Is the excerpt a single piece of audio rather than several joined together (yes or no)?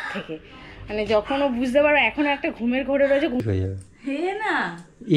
no